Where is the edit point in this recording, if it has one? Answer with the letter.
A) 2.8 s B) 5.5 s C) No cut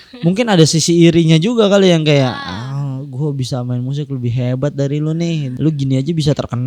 B